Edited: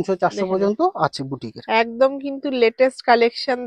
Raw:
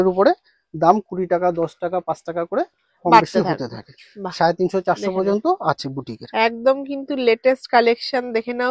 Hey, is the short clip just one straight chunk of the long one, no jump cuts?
yes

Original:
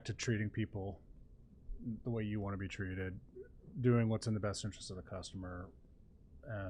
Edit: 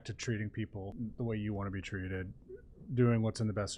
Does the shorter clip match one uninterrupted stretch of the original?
no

